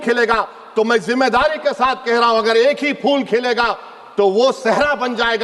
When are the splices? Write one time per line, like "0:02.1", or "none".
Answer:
none